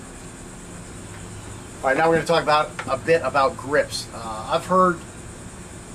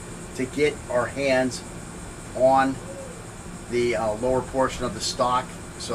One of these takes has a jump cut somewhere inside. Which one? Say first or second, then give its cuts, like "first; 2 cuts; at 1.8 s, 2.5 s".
second; 1 cut; at 4.6 s